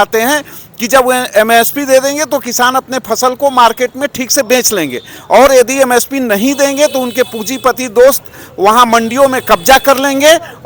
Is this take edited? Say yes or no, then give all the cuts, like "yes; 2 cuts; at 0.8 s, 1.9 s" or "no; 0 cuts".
no; 0 cuts